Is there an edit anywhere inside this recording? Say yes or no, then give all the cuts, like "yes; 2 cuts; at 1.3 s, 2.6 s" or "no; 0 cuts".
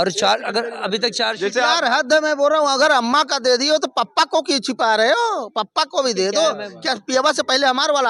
no; 0 cuts